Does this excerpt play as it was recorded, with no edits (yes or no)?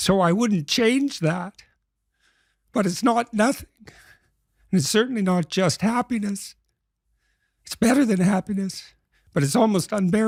yes